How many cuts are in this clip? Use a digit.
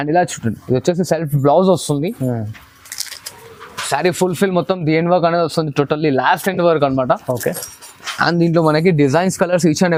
0